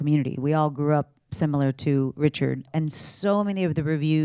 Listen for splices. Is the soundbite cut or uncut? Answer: cut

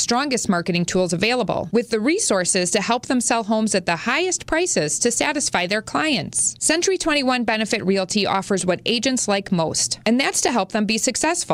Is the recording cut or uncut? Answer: uncut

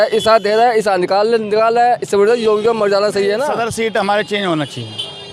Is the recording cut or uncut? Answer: cut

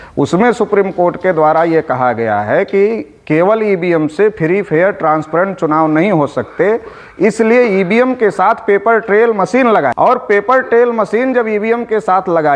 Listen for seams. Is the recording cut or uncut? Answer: cut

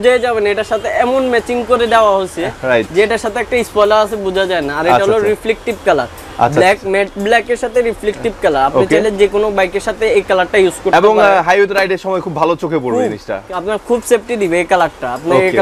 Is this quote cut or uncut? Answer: uncut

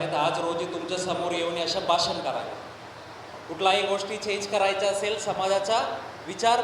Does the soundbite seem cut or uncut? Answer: cut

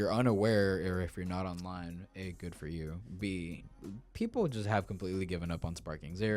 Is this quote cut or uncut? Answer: cut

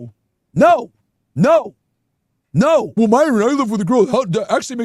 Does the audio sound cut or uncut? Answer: cut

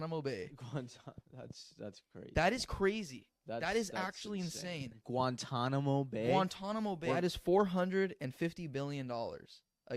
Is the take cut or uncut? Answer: cut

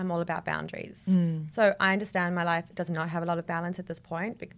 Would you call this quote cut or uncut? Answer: uncut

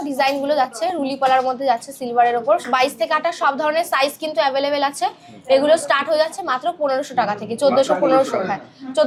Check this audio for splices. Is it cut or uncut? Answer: uncut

